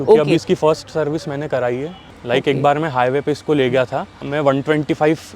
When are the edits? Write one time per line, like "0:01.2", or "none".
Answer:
0:02.0
0:04.2